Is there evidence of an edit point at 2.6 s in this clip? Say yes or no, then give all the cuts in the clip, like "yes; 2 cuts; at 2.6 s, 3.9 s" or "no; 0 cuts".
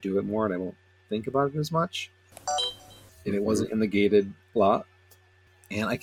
yes; 1 cut; at 2.6 s